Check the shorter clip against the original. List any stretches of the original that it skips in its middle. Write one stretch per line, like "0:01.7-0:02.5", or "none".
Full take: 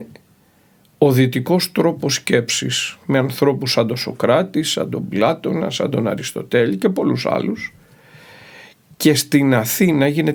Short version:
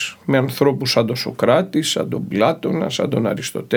none